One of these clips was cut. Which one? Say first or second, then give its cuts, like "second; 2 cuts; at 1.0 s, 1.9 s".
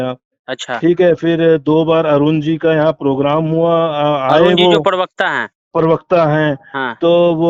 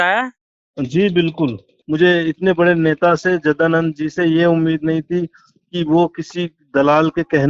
second; 1 cut; at 1.7 s